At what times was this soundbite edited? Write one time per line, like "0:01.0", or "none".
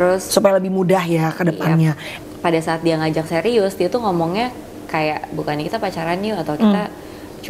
0:02.1